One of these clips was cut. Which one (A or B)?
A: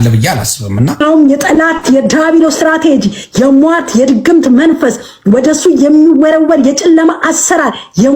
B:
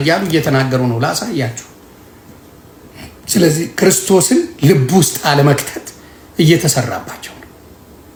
A